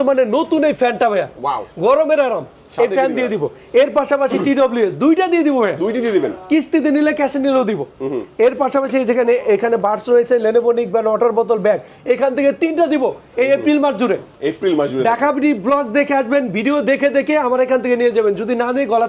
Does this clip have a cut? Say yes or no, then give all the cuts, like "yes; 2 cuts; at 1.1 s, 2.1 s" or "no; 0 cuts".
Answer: no; 0 cuts